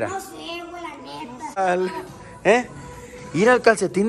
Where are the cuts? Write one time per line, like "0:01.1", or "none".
0:01.6